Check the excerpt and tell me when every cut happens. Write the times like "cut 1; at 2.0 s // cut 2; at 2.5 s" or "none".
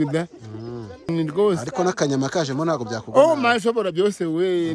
cut 1; at 1.1 s